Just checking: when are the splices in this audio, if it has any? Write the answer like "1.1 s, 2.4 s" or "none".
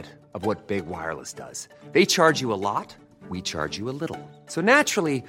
none